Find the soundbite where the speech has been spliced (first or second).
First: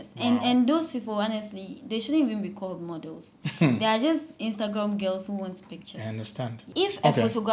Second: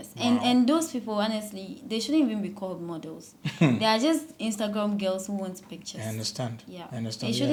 first